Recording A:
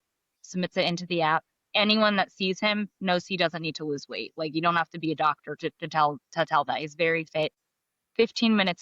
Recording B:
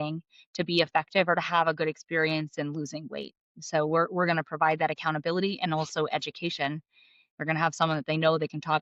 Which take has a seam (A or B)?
A